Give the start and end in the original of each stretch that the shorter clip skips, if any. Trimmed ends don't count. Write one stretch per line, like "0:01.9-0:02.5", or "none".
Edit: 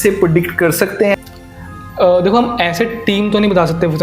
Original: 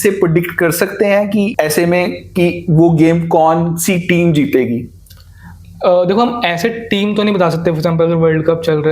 0:01.1-0:05.0